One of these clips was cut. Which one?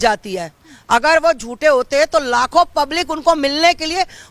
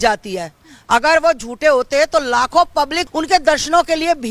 second; 1 cut; at 3.0 s

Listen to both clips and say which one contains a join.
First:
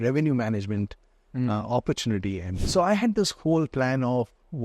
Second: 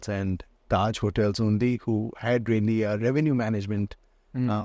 first; 1 cut; at 2.6 s

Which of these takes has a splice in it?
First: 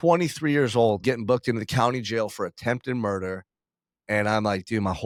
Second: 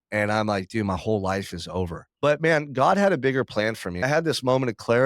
second; 2 cuts; at 2.0 s, 4.0 s

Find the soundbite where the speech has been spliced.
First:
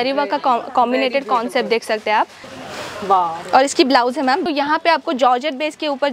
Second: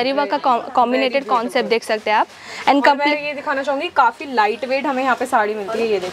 first; 2 cuts; at 2.4 s, 4.4 s

